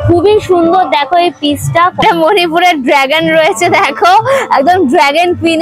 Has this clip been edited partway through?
yes; 1 cut; at 2.0 s

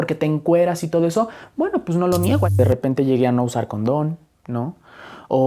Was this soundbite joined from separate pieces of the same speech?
yes; 1 cut; at 2.6 s

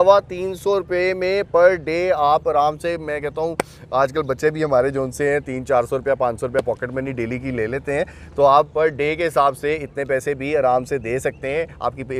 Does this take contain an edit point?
no; 0 cuts

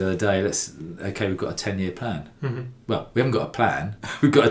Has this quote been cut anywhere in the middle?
no; 0 cuts

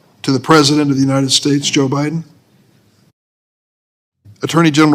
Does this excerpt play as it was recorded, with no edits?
yes; 0 cuts

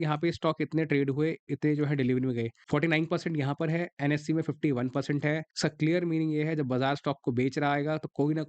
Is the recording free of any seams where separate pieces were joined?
no; 2 cuts; at 2.6 s, 5.5 s

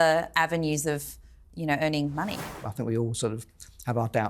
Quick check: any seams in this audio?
yes; 1 cut; at 2.5 s

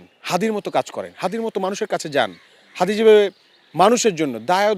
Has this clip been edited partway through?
no; 0 cuts

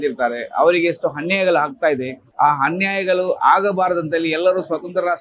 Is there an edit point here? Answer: no; 0 cuts

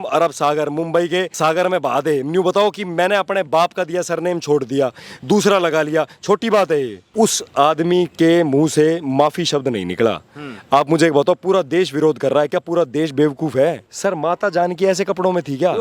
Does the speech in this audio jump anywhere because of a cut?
yes; 3 cuts; at 1.3 s, 7.0 s, 13.9 s

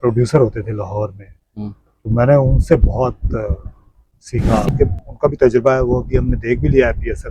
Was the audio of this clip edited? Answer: yes; 1 cut; at 4.7 s

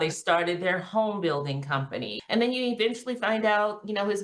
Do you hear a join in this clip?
yes; 1 cut; at 2.2 s

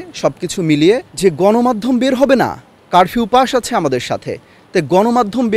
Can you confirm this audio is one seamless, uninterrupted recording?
no; 1 cut; at 1.1 s

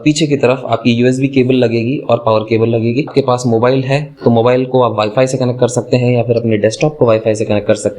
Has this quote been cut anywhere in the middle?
yes; 1 cut; at 3.1 s

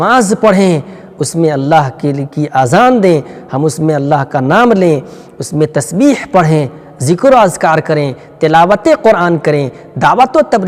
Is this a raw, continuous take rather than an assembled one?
yes; 0 cuts

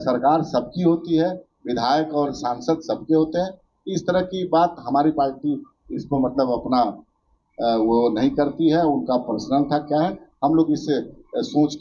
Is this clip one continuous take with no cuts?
yes; 0 cuts

